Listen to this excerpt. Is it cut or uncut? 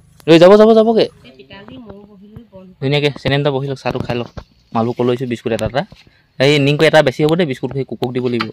cut